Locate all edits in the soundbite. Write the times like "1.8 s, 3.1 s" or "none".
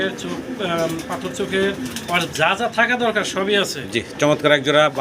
none